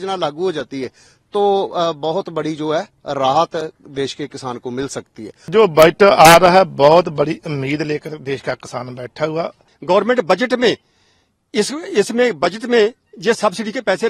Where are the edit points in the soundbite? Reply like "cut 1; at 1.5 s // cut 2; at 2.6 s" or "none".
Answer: cut 1; at 5.3 s // cut 2; at 9.7 s